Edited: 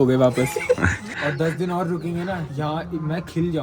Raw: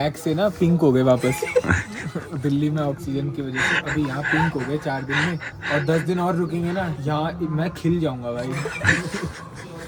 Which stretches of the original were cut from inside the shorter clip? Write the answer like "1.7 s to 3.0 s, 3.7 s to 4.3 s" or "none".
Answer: 1.9 s to 5.5 s